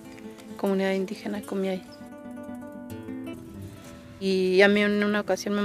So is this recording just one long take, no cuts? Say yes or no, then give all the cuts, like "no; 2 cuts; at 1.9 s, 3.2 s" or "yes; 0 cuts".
yes; 0 cuts